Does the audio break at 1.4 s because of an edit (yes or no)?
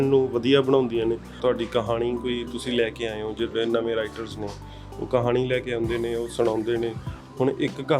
yes